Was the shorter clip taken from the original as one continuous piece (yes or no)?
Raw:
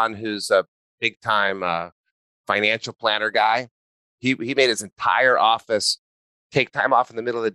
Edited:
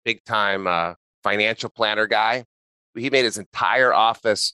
no